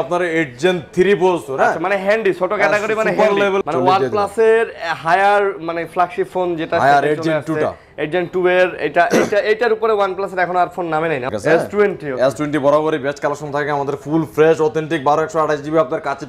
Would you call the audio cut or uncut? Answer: cut